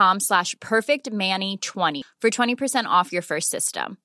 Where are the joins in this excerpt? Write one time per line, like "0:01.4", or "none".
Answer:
0:02.0